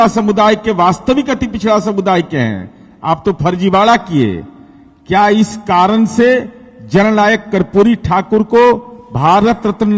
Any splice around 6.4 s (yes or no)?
no